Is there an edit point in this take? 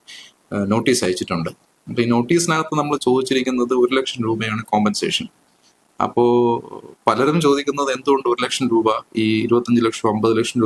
no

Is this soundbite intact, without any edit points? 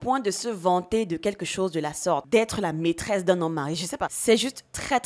no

